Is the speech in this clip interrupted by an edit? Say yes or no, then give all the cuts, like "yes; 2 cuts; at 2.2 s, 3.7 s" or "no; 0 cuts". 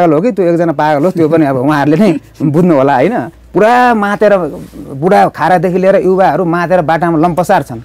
yes; 1 cut; at 3.4 s